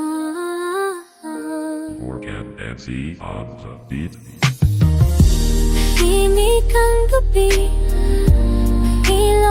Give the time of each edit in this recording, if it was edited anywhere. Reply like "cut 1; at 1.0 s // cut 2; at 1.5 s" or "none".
none

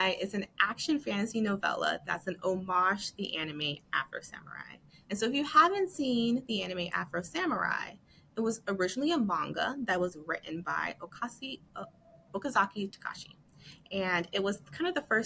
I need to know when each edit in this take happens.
none

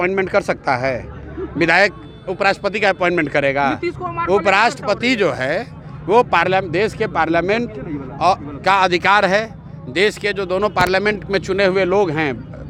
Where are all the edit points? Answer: none

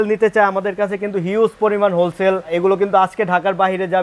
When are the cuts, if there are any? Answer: cut 1; at 2.5 s

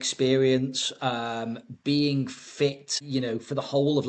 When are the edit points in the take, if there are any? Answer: cut 1; at 2.9 s

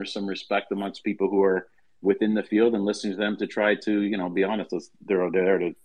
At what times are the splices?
none

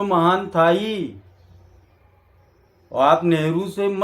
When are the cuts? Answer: none

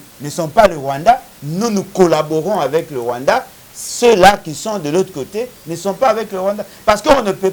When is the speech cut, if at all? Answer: none

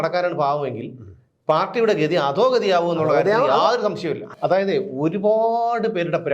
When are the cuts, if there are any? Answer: cut 1; at 4.3 s

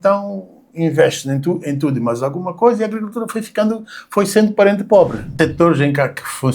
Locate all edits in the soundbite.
cut 1; at 5.3 s

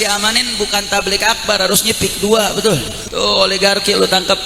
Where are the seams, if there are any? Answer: cut 1; at 3.0 s

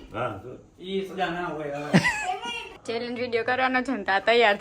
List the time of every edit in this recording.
cut 1; at 2.7 s

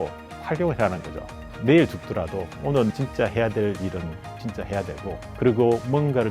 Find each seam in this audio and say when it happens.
cut 1; at 1.3 s // cut 2; at 2.9 s // cut 3; at 5.3 s

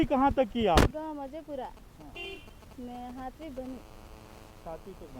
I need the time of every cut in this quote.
cut 1; at 0.9 s

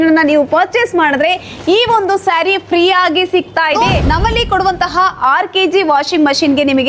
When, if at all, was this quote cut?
cut 1; at 3.7 s

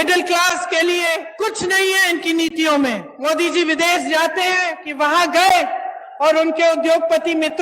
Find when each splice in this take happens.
cut 1; at 1.3 s // cut 2; at 3.1 s // cut 3; at 4.8 s

